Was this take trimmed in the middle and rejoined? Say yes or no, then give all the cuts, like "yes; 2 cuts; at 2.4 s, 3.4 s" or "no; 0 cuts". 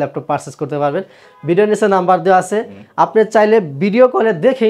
no; 0 cuts